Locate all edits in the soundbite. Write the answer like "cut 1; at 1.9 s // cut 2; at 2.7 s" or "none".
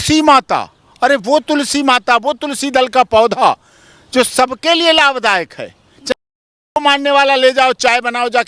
none